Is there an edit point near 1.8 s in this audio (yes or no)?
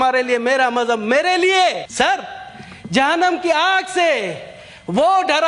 yes